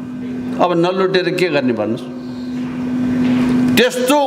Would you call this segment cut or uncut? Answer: uncut